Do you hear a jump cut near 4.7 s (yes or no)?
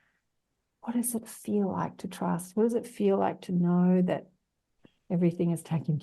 yes